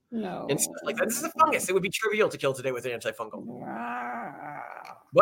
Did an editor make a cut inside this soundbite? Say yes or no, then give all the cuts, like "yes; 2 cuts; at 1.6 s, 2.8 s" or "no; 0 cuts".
no; 0 cuts